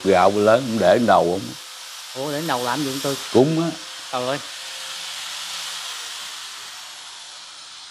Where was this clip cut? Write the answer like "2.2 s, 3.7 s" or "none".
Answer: none